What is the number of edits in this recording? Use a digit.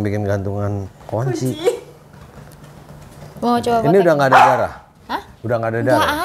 0